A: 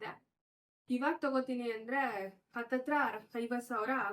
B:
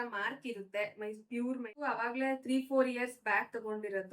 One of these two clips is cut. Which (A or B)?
B